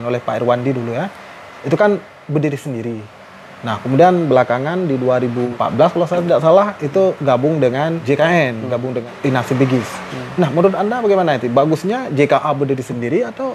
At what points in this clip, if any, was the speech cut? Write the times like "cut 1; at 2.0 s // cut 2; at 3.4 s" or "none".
cut 1; at 5.5 s // cut 2; at 8.0 s // cut 3; at 9.1 s